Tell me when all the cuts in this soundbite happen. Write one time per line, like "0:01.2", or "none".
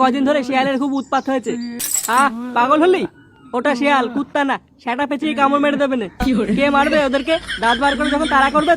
0:01.9